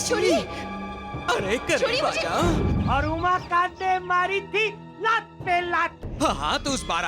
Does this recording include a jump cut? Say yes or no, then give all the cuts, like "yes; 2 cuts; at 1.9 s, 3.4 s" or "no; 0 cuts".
yes; 1 cut; at 6.0 s